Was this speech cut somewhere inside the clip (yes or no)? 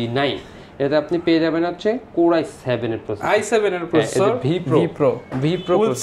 no